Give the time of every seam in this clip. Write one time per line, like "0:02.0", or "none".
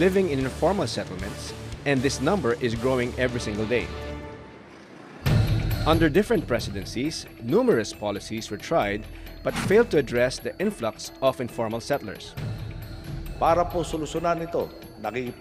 0:06.0